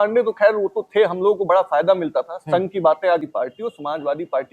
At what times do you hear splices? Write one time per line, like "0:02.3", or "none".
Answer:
0:03.2